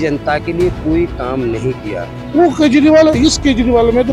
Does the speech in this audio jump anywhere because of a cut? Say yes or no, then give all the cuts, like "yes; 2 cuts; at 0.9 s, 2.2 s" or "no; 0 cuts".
yes; 1 cut; at 2.2 s